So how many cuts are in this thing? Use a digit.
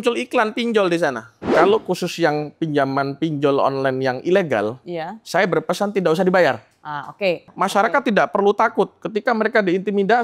2